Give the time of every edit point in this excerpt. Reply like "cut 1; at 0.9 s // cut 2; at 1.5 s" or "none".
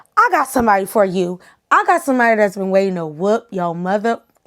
none

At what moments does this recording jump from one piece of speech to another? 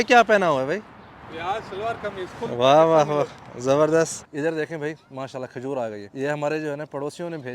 cut 1; at 4.2 s // cut 2; at 6.1 s

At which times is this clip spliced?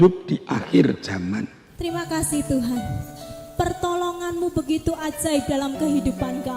cut 1; at 1.6 s

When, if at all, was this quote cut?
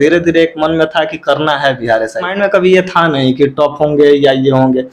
cut 1; at 2.3 s

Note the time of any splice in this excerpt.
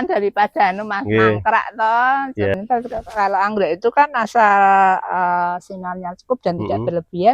cut 1; at 2.5 s

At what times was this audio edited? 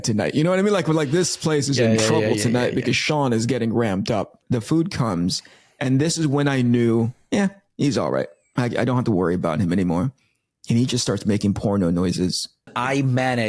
cut 1; at 4.4 s // cut 2; at 12.7 s

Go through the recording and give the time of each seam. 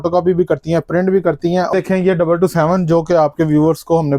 cut 1; at 1.7 s

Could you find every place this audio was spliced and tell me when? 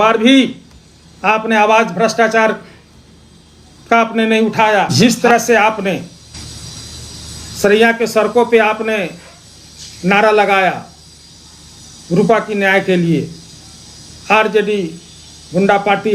cut 1; at 4.9 s // cut 2; at 6.3 s

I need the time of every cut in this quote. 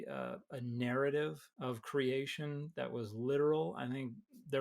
cut 1; at 1.5 s

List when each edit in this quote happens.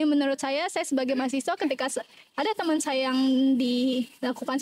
none

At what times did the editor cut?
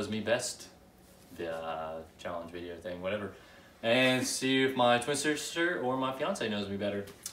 none

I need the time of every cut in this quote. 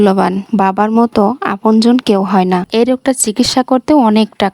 cut 1; at 2.7 s

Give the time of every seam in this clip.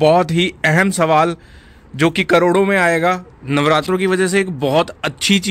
cut 1; at 3.3 s

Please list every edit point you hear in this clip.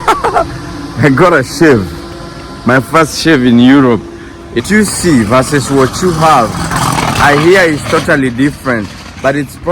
cut 1; at 4.6 s

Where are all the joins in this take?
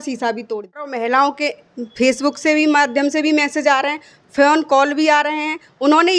cut 1; at 0.9 s

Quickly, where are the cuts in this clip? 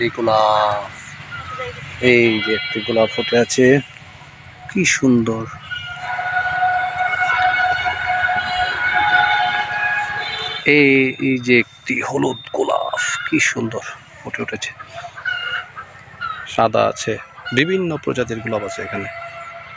cut 1; at 1.8 s // cut 2; at 6.0 s // cut 3; at 10.4 s

